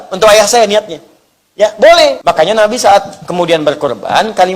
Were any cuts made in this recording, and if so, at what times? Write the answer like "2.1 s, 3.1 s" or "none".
2.2 s

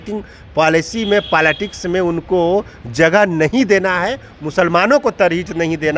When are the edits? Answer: none

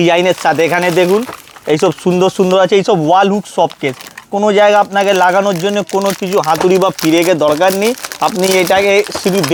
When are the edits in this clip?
none

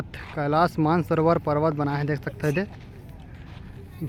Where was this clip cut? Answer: none

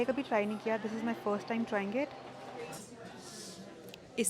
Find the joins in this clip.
2.6 s

